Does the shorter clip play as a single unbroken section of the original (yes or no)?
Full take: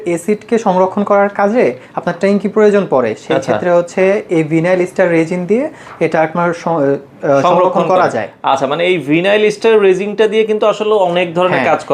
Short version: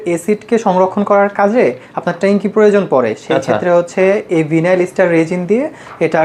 yes